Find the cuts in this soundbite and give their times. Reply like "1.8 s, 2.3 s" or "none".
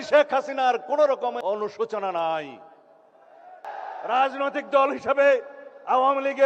1.4 s, 3.7 s